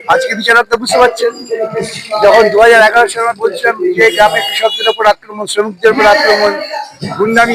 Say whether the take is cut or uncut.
uncut